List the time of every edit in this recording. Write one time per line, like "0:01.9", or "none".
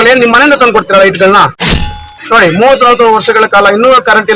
0:01.7

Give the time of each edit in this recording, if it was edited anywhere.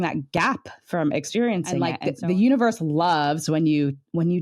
0:01.8

